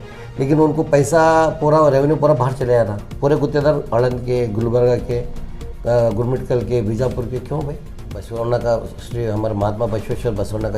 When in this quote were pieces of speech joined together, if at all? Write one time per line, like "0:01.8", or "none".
0:08.2